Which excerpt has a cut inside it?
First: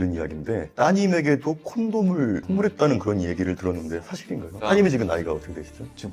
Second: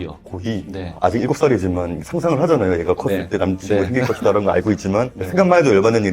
second; 1 cut; at 1.0 s

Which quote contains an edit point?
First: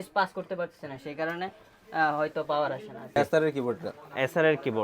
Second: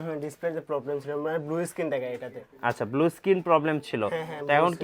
first; 1 cut; at 3.2 s

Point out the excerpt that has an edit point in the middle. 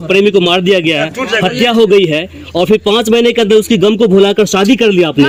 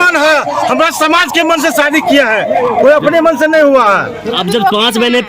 second; 1 cut; at 4.3 s

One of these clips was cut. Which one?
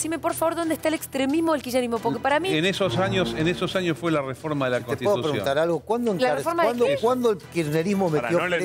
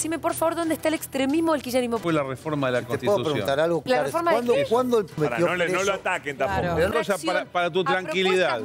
second; 4 cuts; at 2.0 s, 3.8 s, 5.2 s, 6.9 s

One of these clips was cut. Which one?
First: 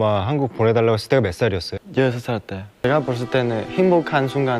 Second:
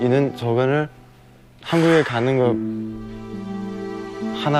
first; 2 cuts; at 1.8 s, 2.7 s

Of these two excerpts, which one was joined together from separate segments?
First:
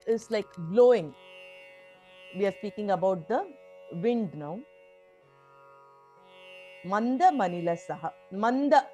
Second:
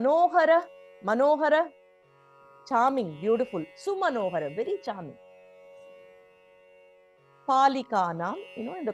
first; 2 cuts; at 4.9 s, 6.5 s

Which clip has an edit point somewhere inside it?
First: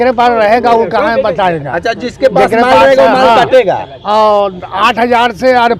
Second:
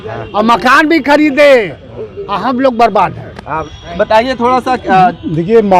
second; 1 cut; at 3.7 s

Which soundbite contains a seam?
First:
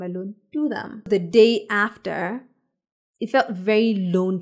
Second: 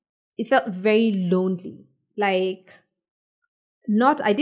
first; 1 cut; at 1.1 s

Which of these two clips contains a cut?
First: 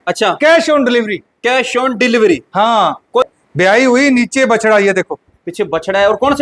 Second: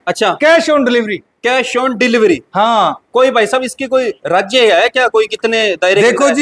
first; 1 cut; at 3.2 s

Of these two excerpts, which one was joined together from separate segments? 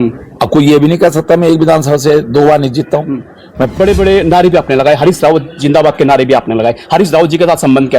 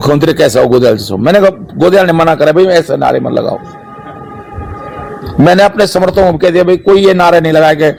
first; 1 cut; at 3.7 s

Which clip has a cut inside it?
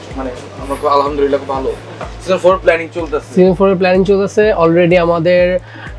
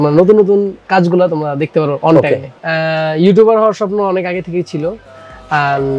second; 1 cut; at 2.5 s

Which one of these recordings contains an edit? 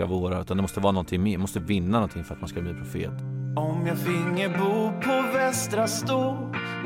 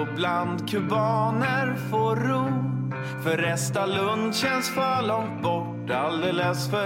first; 1 cut; at 3.1 s

